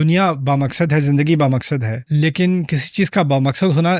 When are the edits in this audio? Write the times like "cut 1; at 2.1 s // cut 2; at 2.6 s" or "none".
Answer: cut 1; at 1.9 s